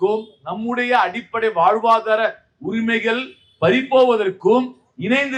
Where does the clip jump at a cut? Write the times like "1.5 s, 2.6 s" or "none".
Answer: none